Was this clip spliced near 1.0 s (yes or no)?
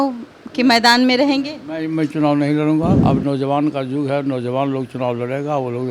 no